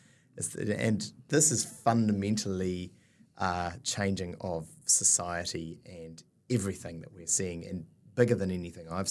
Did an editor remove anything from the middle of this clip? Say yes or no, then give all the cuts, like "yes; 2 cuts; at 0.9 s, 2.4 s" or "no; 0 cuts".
yes; 1 cut; at 1.3 s